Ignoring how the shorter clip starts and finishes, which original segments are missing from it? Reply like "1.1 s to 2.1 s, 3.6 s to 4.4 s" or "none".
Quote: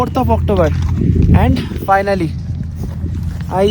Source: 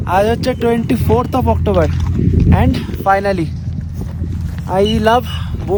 none